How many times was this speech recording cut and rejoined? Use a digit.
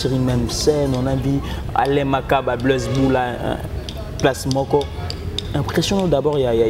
0